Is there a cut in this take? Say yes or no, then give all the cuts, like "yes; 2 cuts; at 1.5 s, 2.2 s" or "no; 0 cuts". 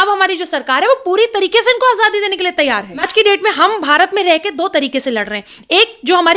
yes; 1 cut; at 3.0 s